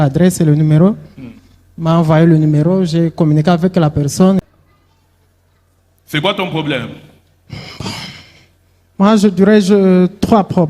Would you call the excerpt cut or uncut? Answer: cut